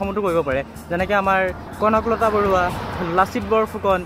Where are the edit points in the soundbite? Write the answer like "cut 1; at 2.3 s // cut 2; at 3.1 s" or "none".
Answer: none